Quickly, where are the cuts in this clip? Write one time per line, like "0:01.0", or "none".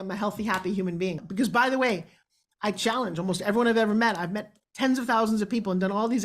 0:01.2